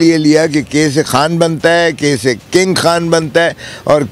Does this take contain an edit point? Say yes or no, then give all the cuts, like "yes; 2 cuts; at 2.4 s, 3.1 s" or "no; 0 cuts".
yes; 2 cuts; at 1.1 s, 2.4 s